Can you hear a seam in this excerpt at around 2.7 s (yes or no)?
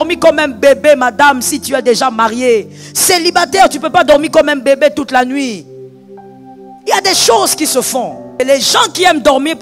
no